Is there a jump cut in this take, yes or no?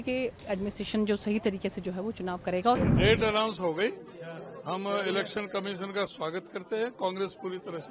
yes